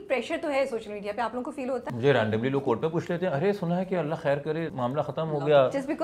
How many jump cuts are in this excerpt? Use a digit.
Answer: 2